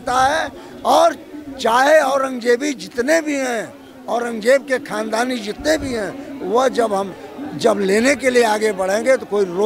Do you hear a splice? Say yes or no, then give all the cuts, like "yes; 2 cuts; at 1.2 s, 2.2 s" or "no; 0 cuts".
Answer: no; 0 cuts